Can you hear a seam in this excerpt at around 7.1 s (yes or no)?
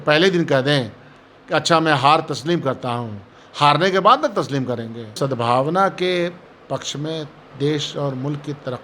no